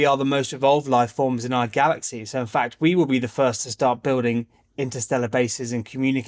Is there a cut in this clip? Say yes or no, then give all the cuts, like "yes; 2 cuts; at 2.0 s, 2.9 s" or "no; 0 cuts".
no; 0 cuts